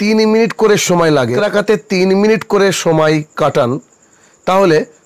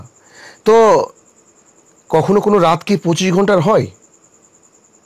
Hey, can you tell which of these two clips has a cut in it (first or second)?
first